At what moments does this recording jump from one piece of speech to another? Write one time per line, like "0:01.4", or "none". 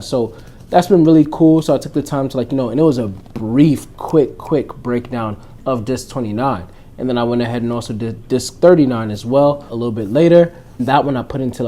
0:08.2
0:09.7
0:10.7